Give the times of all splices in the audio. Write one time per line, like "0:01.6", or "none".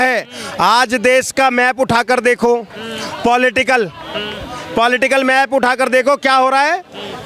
none